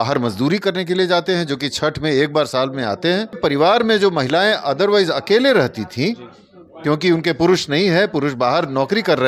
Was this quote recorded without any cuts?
no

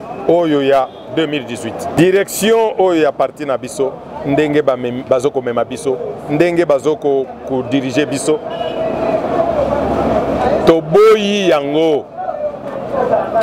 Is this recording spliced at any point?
yes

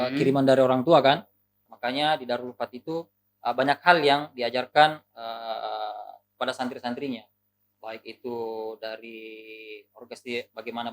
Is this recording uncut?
no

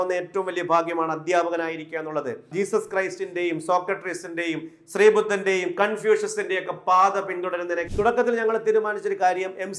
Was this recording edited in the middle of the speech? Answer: yes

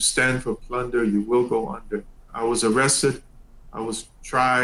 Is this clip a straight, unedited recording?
no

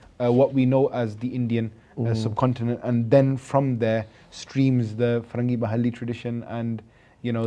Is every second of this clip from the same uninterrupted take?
yes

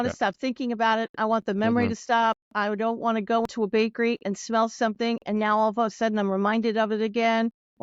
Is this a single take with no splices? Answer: no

